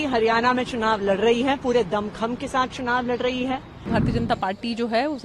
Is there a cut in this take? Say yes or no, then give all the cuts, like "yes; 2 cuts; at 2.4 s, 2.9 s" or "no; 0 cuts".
yes; 1 cut; at 3.9 s